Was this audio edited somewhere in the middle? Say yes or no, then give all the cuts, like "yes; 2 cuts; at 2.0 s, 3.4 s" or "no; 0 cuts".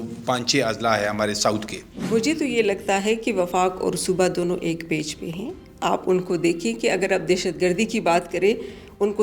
yes; 1 cut; at 1.9 s